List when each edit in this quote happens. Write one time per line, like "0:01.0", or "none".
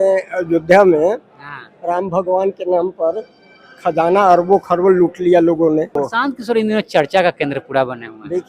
0:06.0